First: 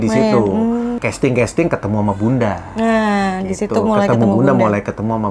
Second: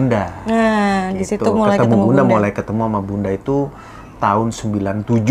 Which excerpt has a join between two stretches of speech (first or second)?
first